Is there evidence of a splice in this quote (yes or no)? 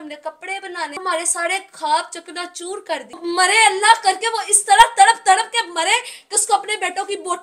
yes